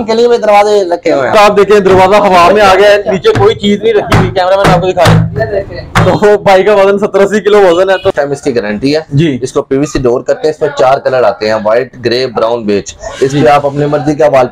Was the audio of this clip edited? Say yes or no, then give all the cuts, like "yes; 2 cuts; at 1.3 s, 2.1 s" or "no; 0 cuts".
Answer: yes; 2 cuts; at 1.3 s, 8.1 s